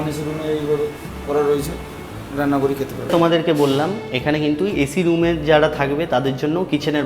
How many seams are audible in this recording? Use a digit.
1